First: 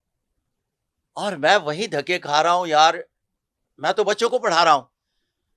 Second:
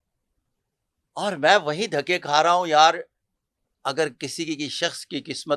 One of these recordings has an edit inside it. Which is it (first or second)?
second